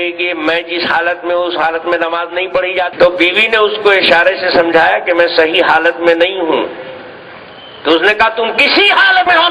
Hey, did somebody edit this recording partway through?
yes; 1 cut; at 2.9 s

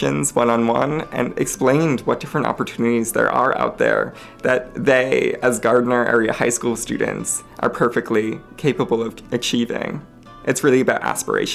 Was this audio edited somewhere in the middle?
no; 0 cuts

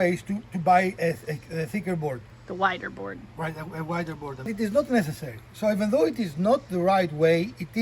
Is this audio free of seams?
no; 2 cuts; at 2.3 s, 4.5 s

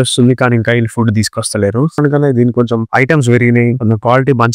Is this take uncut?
no; 1 cut; at 2.0 s

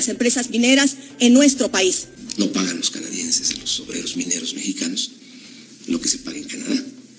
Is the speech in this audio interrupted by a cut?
yes; 1 cut; at 2.1 s

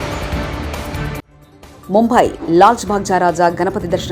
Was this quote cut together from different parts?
no; 0 cuts

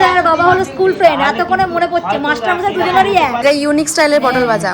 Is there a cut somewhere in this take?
yes; 1 cut; at 3.4 s

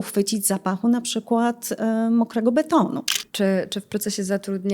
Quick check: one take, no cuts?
no; 1 cut; at 3.2 s

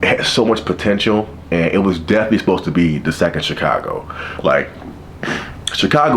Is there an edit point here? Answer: no; 0 cuts

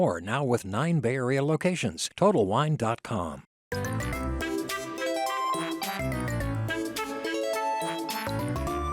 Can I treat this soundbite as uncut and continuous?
no; 1 cut; at 3.5 s

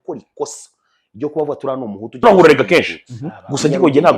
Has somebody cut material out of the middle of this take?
yes; 1 cut; at 2.2 s

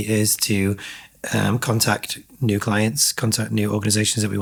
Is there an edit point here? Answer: no; 0 cuts

